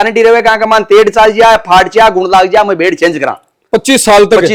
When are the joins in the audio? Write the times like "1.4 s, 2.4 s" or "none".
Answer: none